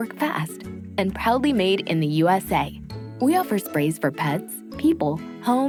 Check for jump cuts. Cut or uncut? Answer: uncut